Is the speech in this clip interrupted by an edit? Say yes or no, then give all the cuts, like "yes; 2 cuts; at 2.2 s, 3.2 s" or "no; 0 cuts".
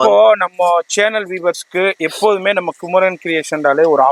no; 0 cuts